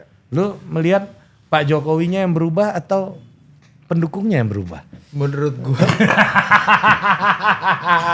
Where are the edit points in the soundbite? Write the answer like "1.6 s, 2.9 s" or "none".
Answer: none